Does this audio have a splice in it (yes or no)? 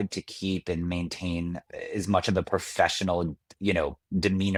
no